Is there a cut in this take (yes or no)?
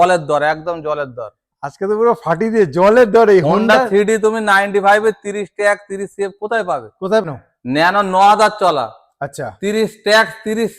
yes